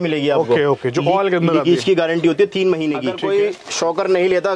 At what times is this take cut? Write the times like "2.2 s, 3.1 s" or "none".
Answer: 3.1 s